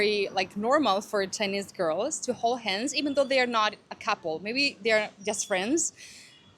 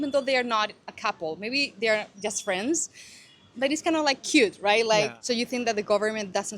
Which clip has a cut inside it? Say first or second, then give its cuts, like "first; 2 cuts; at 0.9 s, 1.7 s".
second; 1 cut; at 5.2 s